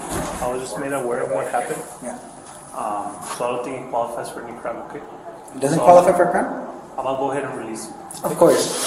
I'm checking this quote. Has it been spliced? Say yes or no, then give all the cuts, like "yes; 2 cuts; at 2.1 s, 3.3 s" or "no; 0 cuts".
no; 0 cuts